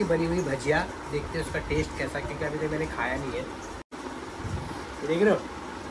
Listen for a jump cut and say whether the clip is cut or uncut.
uncut